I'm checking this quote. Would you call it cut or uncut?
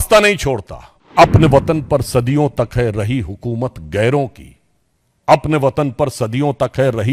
cut